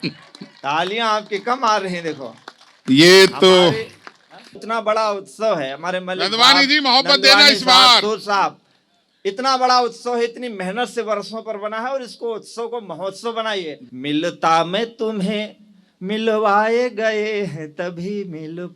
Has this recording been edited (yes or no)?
yes